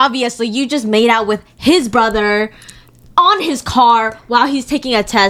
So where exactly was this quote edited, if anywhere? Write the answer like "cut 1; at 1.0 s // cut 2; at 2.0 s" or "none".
none